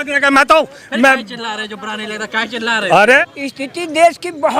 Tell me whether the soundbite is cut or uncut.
cut